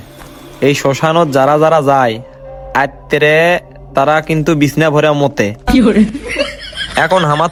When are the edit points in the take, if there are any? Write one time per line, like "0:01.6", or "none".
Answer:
none